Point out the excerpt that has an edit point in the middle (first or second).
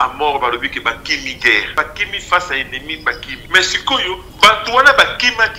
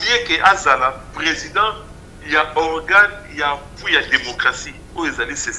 first